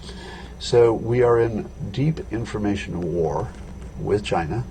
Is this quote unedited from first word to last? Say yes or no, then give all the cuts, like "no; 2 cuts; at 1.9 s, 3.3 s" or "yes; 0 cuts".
yes; 0 cuts